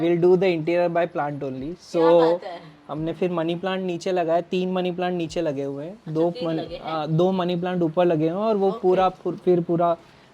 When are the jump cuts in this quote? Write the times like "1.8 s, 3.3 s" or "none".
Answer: none

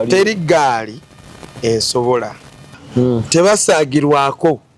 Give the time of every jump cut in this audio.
2.8 s

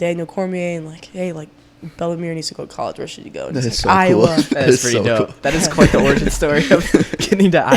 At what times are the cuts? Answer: none

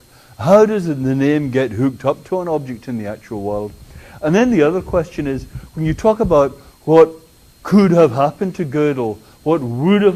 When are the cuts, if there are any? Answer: 5.0 s

